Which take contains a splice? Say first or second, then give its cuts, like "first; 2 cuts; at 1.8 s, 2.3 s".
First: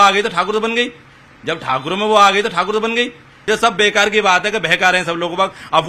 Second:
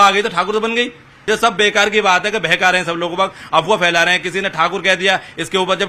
second; 1 cut; at 1.0 s